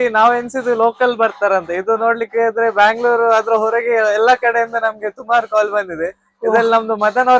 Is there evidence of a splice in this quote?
no; 0 cuts

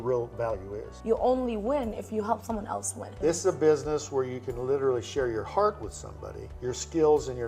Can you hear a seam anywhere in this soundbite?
yes; 2 cuts; at 0.9 s, 3.1 s

